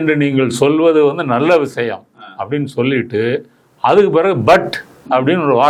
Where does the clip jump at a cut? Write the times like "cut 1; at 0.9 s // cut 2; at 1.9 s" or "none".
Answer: none

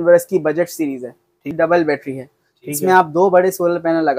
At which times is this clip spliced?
cut 1; at 1.4 s

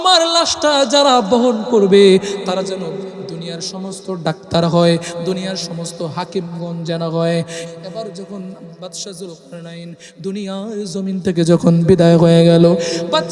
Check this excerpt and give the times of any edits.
cut 1; at 7.6 s

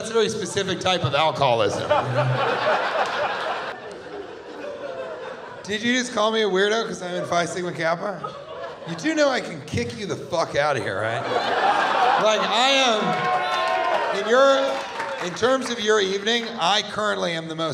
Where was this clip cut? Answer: cut 1; at 3.7 s

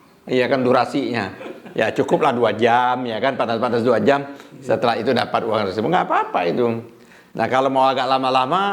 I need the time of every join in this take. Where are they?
none

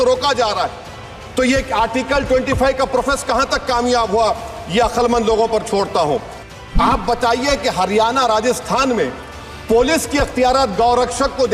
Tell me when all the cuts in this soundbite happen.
cut 1; at 6.4 s

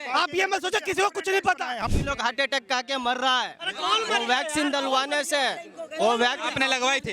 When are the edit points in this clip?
cut 1; at 1.8 s

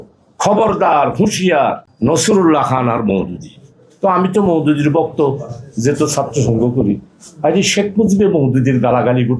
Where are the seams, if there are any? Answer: cut 1; at 1.9 s

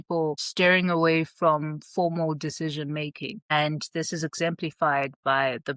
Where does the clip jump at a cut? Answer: none

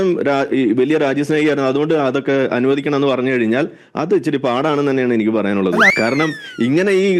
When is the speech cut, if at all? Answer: cut 1; at 5.8 s

